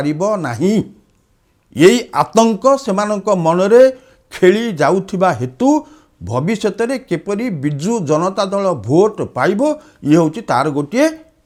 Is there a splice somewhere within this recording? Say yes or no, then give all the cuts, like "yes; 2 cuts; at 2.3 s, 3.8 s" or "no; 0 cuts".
no; 0 cuts